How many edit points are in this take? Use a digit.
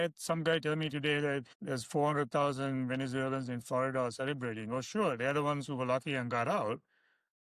1